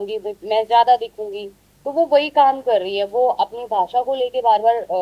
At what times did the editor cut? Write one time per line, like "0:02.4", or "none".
none